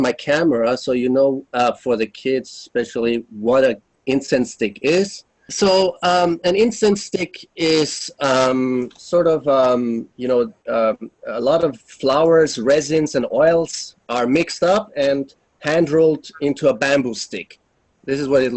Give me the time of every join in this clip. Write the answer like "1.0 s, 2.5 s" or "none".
none